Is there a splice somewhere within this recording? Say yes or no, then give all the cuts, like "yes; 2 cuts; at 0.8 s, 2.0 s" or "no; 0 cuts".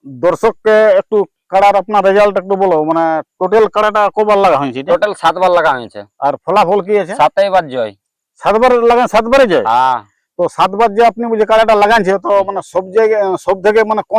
no; 0 cuts